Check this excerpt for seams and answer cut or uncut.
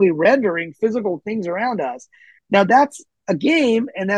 uncut